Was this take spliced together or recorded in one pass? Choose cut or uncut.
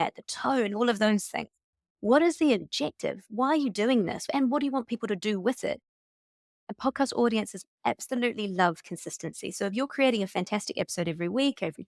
cut